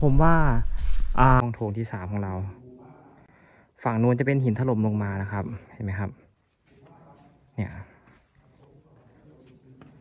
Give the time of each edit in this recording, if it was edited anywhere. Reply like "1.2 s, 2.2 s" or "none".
1.4 s

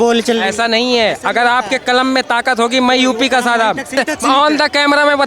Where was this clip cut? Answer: 4.0 s

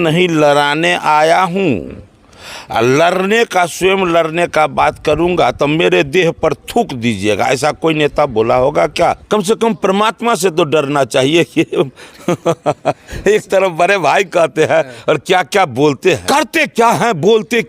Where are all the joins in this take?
9.2 s, 16.2 s

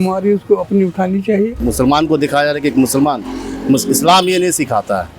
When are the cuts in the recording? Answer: 1.6 s

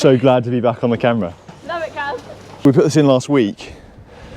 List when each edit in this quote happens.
2.6 s

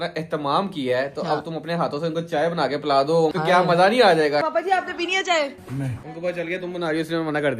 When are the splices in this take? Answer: 3.3 s, 4.4 s, 5.9 s

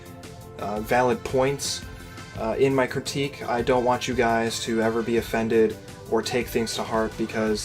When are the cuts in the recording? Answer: 2.8 s

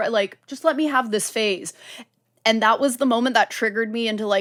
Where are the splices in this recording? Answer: none

